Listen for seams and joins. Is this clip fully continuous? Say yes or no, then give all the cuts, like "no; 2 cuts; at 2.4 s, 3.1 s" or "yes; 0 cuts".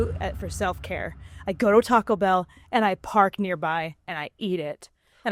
yes; 0 cuts